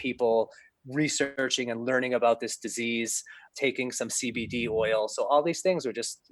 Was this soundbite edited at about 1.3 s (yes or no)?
yes